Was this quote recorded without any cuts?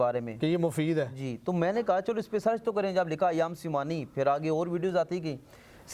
yes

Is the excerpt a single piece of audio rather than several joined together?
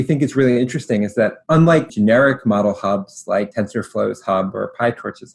no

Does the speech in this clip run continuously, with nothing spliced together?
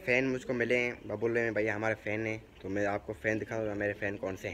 yes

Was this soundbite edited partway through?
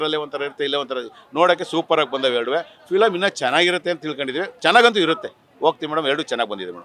no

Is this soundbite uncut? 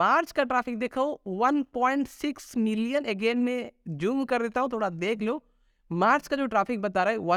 yes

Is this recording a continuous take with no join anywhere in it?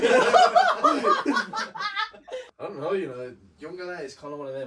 yes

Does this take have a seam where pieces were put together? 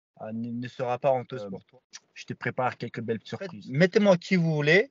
yes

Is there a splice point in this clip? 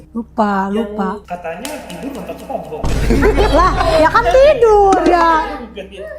yes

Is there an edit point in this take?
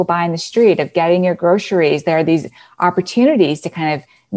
no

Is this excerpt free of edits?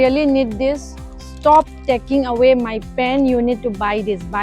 yes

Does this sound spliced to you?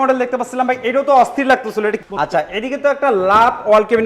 yes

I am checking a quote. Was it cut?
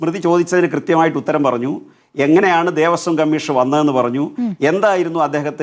no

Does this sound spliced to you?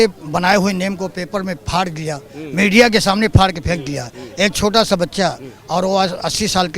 no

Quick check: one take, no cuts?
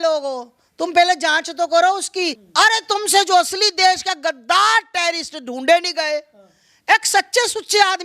no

